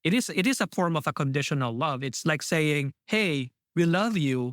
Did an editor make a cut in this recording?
yes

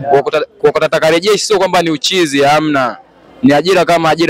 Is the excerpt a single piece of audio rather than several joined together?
yes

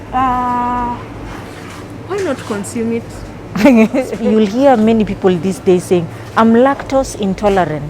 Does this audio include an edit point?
yes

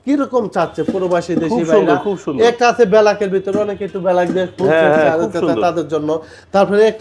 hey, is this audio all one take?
yes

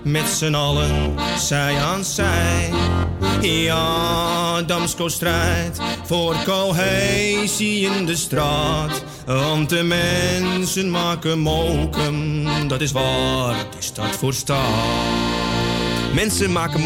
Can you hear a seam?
no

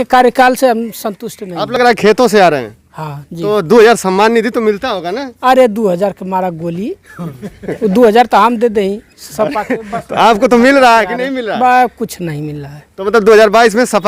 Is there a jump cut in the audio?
no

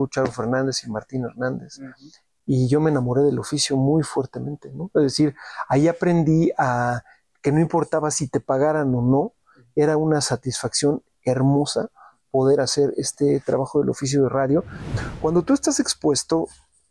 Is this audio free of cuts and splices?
no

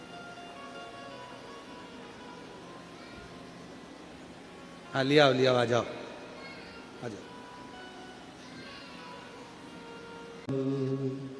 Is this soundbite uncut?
no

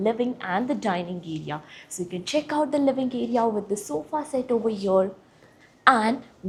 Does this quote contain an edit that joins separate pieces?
no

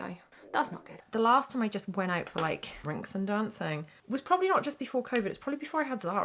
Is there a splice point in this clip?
yes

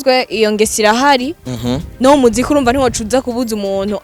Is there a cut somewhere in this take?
no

